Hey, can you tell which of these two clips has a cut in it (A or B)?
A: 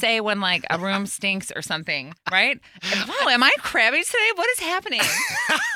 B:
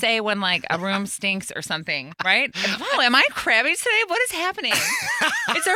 B